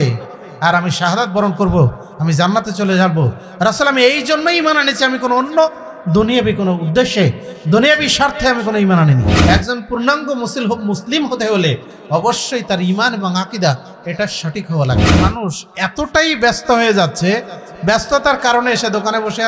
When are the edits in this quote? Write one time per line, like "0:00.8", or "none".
0:09.3
0:15.1